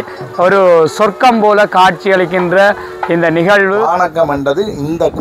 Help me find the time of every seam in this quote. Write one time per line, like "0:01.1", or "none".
0:03.9